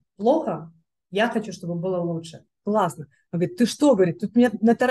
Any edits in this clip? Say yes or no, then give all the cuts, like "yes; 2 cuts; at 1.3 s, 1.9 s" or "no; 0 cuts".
yes; 1 cut; at 2.4 s